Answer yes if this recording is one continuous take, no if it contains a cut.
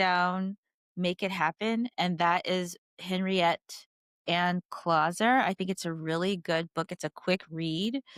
yes